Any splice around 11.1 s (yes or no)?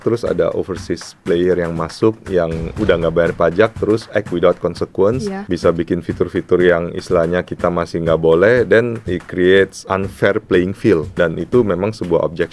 yes